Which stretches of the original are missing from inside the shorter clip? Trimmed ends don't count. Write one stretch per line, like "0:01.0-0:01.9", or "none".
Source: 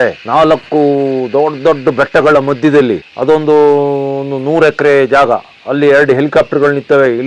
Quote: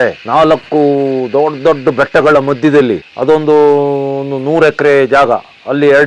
none